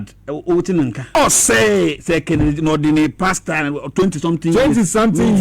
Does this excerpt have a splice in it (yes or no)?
yes